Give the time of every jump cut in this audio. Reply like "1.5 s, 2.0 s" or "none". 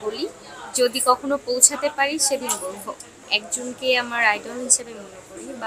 3.2 s